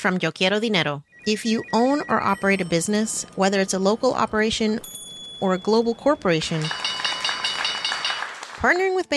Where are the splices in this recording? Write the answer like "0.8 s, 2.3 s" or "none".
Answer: 1.1 s